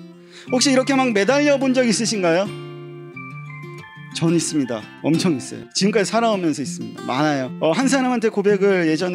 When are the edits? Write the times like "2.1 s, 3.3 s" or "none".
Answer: 4.9 s, 5.6 s, 7.5 s